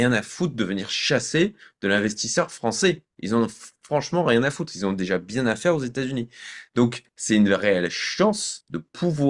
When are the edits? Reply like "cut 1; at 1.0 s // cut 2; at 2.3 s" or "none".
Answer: none